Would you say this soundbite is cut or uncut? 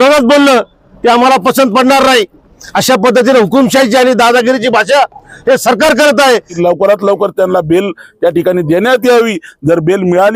cut